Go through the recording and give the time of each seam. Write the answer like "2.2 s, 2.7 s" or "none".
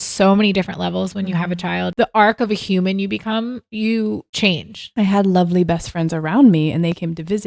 1.9 s, 3.7 s, 4.8 s